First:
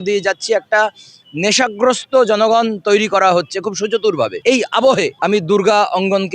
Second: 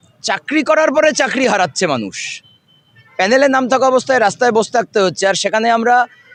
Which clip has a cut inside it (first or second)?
first